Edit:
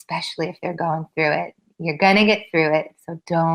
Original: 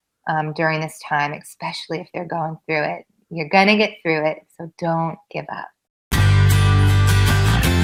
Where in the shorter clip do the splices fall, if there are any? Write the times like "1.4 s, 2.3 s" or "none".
none

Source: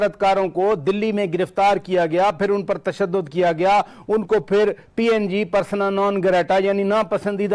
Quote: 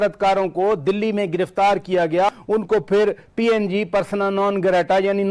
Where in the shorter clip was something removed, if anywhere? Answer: 2.3 s

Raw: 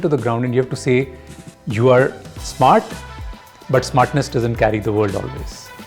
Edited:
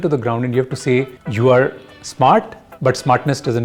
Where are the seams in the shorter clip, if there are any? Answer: 1.2 s, 2.6 s

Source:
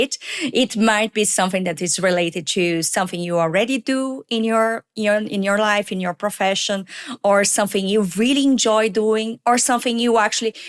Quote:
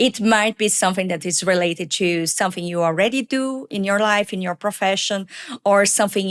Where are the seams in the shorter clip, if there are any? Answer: 3.7 s

